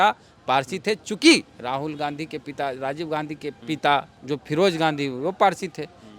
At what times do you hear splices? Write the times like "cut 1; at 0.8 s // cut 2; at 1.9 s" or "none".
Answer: cut 1; at 3.6 s // cut 2; at 4.1 s